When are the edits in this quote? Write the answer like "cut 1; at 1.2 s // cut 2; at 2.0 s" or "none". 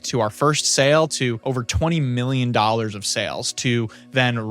cut 1; at 1.4 s